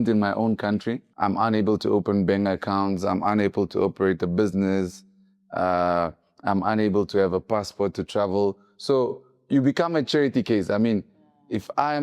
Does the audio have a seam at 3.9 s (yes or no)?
no